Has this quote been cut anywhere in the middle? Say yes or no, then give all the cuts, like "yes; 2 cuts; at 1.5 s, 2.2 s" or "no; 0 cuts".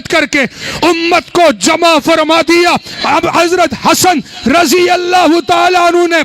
yes; 1 cut; at 2.9 s